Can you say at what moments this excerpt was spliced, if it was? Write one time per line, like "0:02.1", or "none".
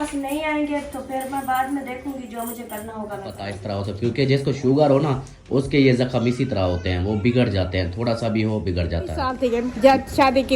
0:03.6
0:09.4